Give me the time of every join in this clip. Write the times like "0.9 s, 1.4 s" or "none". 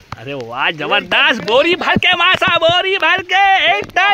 none